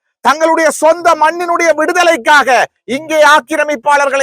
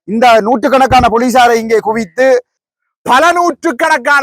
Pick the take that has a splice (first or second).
second